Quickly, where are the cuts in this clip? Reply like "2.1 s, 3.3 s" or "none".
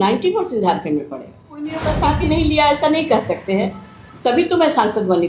1.7 s